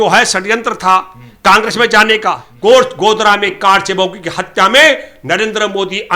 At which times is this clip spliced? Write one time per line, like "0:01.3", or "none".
0:02.5